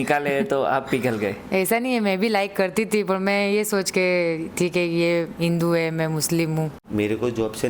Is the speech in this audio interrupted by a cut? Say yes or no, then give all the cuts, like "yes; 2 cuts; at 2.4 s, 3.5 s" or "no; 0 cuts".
yes; 1 cut; at 6.8 s